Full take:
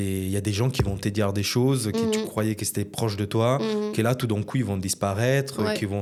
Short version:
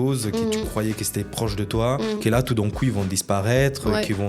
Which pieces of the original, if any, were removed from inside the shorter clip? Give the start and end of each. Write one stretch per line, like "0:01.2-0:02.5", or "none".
0:03.8-0:03.9